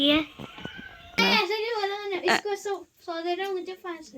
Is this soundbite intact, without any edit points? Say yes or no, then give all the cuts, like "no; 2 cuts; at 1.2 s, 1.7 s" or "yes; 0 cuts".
no; 1 cut; at 1.2 s